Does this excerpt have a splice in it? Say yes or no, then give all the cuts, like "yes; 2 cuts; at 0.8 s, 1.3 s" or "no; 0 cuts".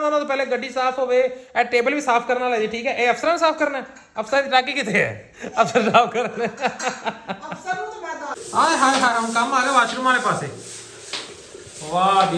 yes; 1 cut; at 8.4 s